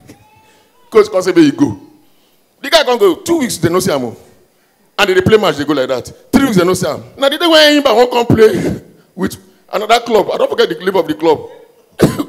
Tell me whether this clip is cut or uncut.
cut